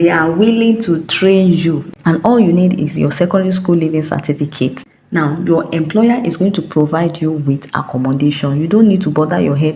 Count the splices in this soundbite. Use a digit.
0